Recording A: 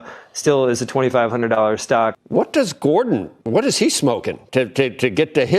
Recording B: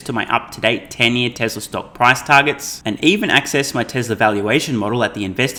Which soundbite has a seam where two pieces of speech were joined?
A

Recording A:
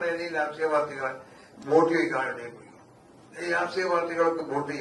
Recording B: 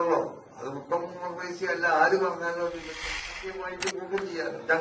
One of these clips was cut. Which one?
B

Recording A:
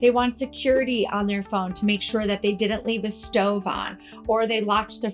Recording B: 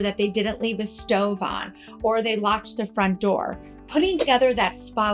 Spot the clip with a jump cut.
B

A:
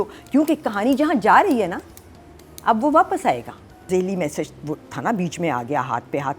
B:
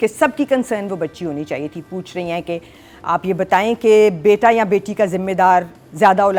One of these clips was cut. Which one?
A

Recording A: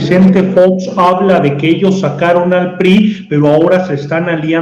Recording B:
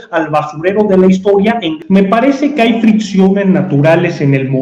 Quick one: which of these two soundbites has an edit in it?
B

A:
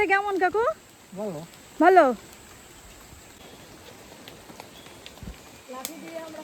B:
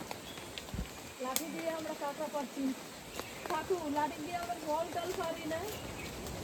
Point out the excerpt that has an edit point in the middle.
A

